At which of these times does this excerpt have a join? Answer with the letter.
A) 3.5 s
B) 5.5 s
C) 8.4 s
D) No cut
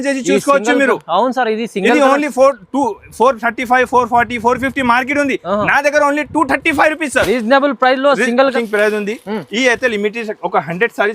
C